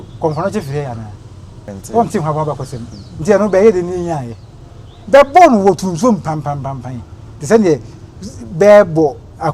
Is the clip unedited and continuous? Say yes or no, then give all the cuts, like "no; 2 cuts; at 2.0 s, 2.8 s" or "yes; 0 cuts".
no; 1 cut; at 1.8 s